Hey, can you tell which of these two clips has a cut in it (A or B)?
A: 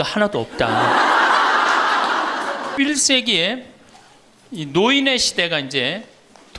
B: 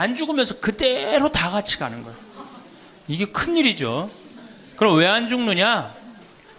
A